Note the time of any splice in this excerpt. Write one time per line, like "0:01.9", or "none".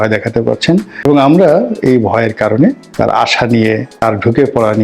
0:01.0
0:02.9
0:04.0